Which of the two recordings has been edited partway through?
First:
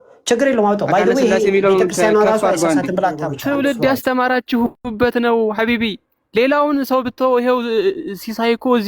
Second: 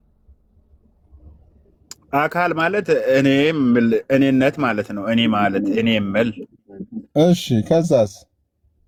first; 1 cut; at 3.4 s

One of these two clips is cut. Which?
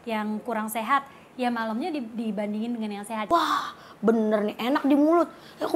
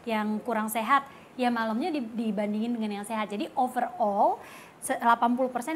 first; 1 cut; at 3.3 s

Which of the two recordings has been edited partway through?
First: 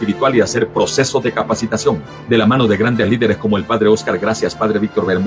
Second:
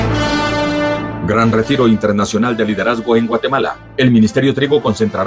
first; 1 cut; at 0.9 s

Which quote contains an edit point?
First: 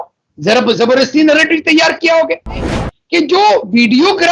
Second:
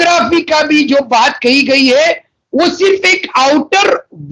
first; 1 cut; at 2.7 s

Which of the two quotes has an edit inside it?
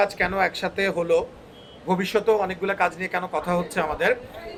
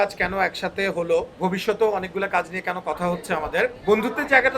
second; 2 cuts; at 1.3 s, 3.8 s

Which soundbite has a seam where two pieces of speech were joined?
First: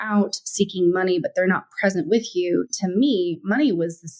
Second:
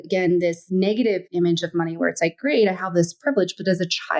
second; 1 cut; at 1.0 s

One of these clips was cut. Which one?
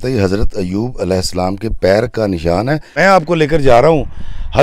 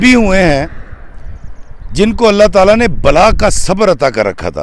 first; 1 cut; at 2.9 s

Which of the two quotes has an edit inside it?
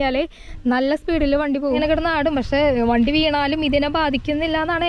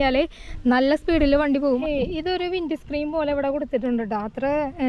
first; 1 cut; at 1.8 s

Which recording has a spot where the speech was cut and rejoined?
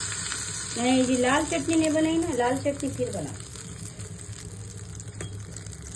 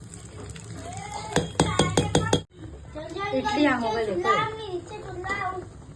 second; 1 cut; at 2.4 s

